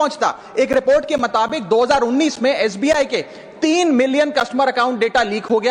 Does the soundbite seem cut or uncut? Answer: uncut